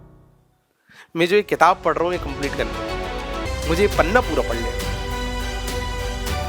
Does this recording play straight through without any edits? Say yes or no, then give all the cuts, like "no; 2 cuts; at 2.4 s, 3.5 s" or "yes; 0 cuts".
no; 1 cut; at 3.5 s